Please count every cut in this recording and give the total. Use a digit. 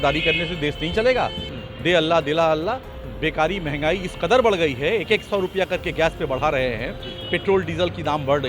1